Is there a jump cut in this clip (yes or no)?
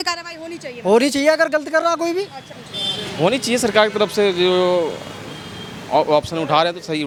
no